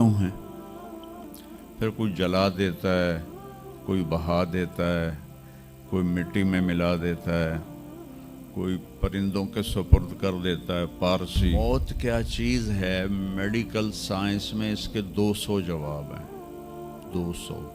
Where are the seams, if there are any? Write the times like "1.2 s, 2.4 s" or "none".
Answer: 11.5 s